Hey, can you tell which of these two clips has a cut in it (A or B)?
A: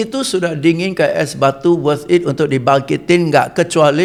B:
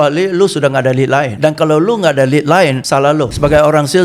B